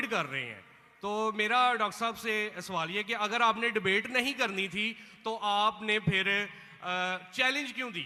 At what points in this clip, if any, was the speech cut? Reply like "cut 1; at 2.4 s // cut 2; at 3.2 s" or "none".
none